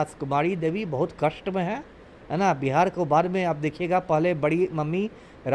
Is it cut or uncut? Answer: uncut